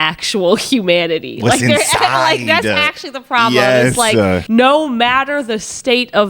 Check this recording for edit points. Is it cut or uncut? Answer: cut